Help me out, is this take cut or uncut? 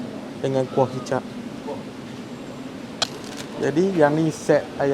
cut